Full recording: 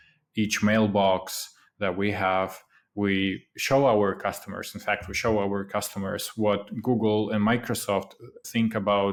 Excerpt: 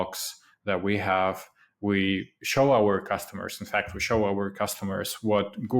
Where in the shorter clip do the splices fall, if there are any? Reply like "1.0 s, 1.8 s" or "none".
none

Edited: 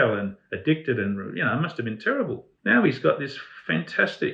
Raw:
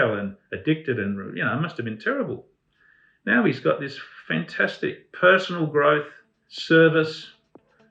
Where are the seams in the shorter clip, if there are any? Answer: 2.5 s

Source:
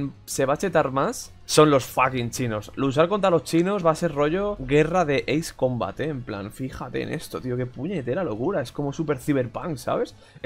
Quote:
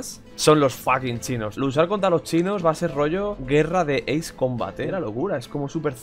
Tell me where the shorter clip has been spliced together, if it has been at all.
1.5 s, 4.9 s

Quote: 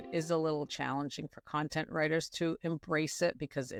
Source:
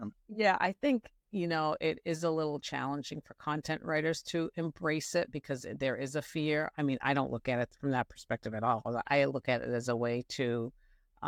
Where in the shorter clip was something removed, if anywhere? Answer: none

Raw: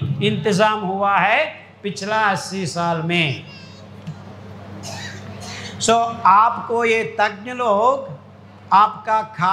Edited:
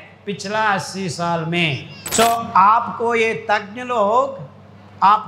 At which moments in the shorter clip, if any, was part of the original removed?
1.9 s

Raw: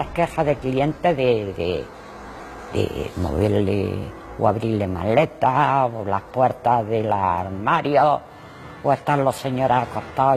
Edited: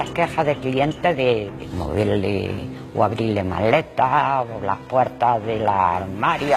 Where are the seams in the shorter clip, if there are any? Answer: 1.5 s

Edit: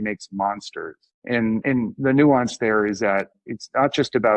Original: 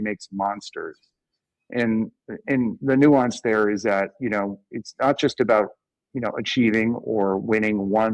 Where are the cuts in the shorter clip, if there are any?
1.4 s, 3.3 s

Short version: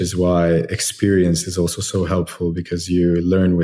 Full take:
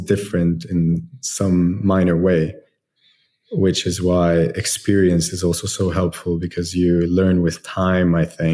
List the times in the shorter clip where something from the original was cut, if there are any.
none

